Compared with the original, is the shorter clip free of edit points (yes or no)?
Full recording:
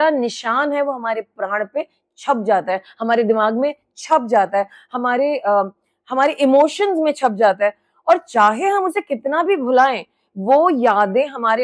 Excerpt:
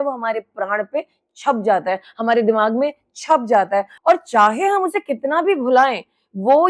no